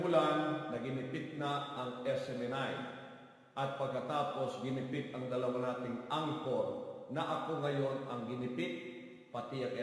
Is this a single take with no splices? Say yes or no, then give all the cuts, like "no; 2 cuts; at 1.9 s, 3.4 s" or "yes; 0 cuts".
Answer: no; 1 cut; at 7.0 s